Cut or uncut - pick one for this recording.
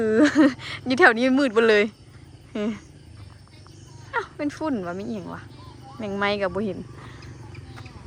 uncut